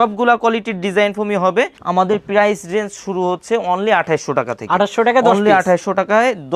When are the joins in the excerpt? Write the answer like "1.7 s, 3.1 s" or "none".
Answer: 1.8 s

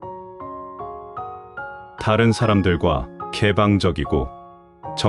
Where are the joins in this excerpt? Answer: none

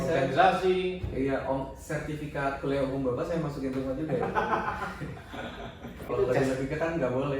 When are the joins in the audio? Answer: 6.0 s

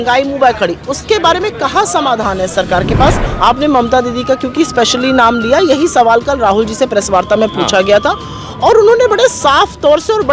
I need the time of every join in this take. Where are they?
3.3 s

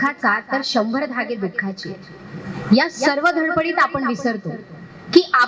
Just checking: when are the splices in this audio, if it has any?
none

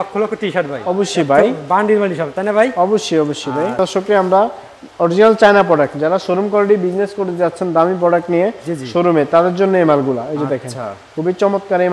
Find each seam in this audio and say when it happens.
3.8 s

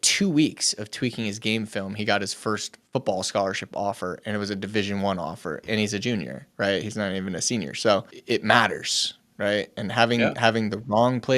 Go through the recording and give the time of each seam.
5.6 s, 8.1 s

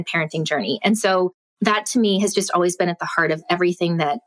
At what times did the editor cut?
1.5 s

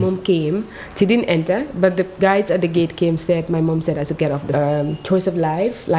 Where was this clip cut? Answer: 4.5 s

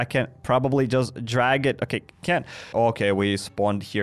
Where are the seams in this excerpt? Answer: 2.7 s

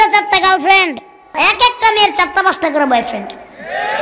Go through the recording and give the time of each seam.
1.3 s

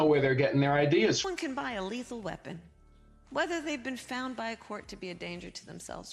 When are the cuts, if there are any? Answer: 1.3 s

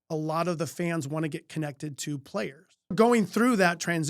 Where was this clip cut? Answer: 2.9 s

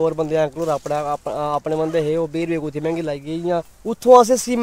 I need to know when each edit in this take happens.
3.5 s

